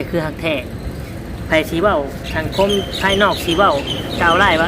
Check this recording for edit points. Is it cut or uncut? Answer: uncut